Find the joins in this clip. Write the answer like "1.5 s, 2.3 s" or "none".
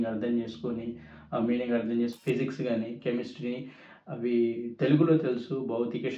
2.2 s